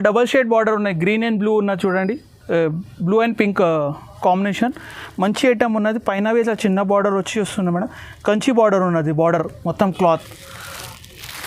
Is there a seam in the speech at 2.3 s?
no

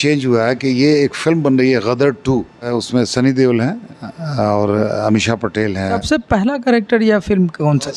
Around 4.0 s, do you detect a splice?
no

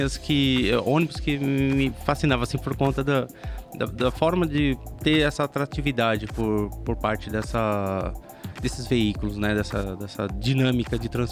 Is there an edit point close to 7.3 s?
no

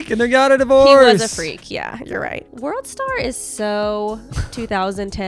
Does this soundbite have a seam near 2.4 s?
yes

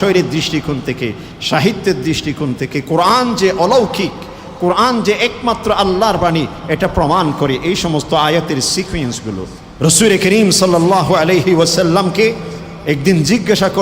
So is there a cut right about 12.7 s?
no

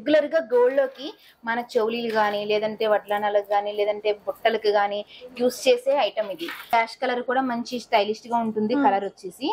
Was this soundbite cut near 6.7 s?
yes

